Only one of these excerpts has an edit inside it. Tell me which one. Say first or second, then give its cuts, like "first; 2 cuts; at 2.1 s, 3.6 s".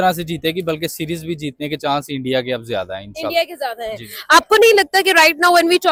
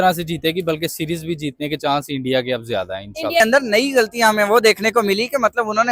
second; 1 cut; at 3.4 s